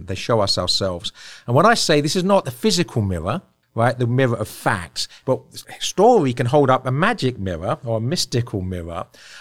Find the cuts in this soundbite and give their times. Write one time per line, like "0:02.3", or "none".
0:02.5
0:03.6
0:05.3